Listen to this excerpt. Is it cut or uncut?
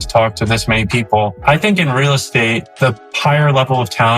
cut